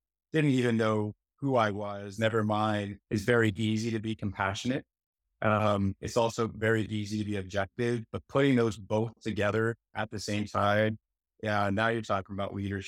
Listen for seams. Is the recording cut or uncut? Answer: cut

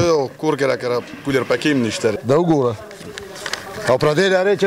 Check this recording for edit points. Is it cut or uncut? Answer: cut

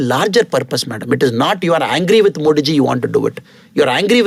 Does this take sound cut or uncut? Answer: uncut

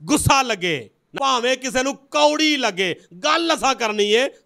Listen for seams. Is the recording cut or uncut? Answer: cut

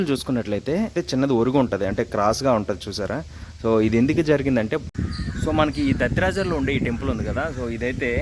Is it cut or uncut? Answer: cut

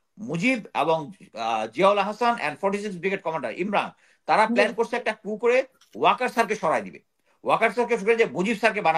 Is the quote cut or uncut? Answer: uncut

